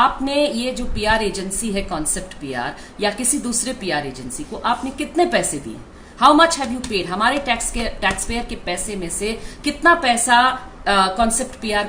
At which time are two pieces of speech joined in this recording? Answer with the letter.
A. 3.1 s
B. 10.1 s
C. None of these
C